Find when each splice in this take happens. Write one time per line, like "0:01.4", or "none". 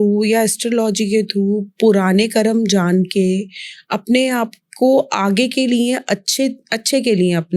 none